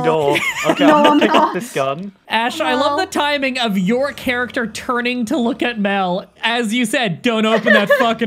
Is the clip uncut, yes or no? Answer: no